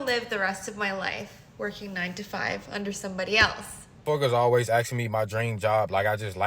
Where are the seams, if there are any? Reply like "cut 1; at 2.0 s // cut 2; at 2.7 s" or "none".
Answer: cut 1; at 4.0 s